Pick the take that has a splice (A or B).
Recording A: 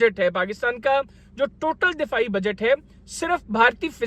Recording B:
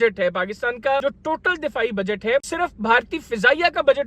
B